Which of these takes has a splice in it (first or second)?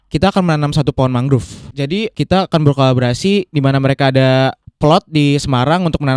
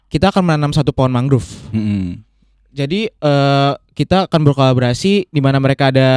first